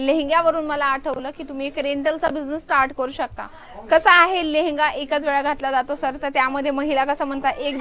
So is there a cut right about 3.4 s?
no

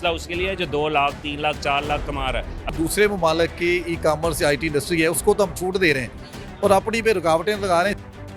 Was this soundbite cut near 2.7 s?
yes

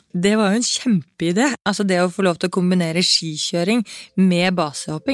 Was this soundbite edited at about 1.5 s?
yes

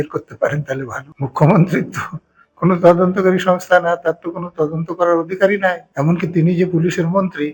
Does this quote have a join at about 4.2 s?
no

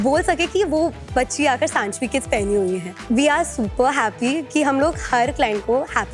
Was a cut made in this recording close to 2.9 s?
yes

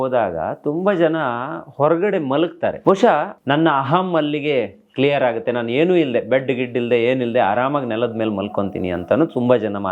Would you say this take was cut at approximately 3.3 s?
yes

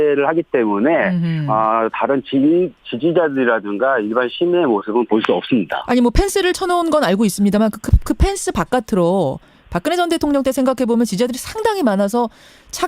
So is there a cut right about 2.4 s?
no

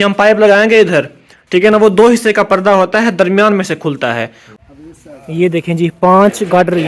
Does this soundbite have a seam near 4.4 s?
yes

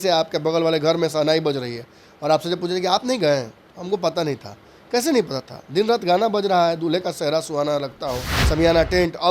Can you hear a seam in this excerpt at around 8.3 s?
yes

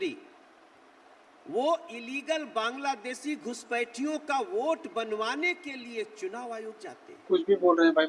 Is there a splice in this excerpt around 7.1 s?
yes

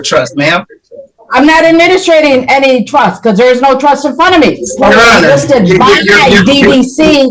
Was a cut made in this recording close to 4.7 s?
yes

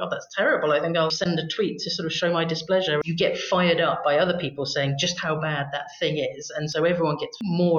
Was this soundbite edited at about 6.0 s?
no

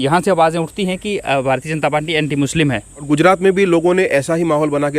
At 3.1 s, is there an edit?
yes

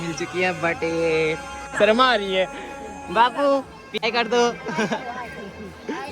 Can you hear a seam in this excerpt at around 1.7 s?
yes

